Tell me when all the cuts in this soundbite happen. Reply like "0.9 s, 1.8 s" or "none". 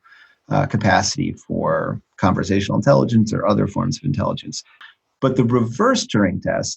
4.8 s